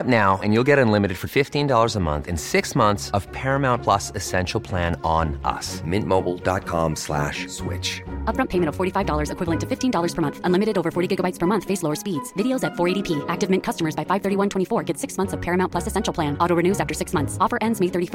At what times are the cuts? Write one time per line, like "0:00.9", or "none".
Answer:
none